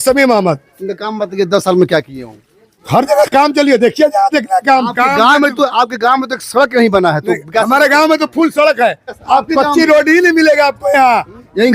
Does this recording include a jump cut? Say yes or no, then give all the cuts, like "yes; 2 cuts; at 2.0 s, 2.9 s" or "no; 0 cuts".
yes; 1 cut; at 9.1 s